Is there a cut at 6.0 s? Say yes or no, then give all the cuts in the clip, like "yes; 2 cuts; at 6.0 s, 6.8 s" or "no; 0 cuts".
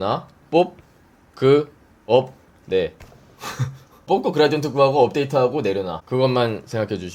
yes; 2 cuts; at 4.1 s, 6.0 s